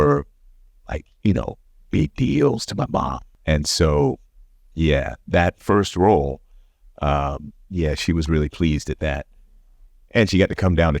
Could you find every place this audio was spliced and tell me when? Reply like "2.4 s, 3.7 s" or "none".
3.2 s